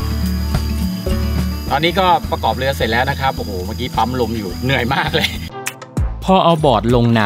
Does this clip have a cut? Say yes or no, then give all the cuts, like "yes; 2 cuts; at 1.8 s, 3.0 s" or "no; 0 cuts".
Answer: yes; 1 cut; at 5.5 s